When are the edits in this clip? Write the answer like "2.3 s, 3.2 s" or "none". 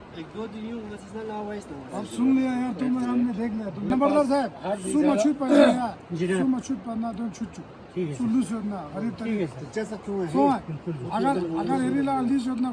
3.9 s